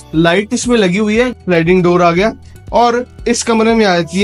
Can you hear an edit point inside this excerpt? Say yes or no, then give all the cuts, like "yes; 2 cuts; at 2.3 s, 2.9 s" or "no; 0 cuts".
yes; 1 cut; at 1.3 s